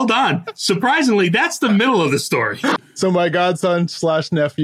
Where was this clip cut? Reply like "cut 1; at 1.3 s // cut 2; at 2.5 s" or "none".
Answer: cut 1; at 2.7 s